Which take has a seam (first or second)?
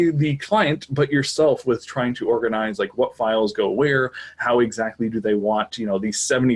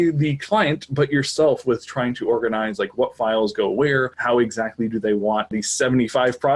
second